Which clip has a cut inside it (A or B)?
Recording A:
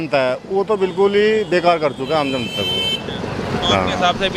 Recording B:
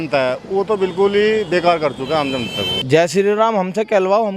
B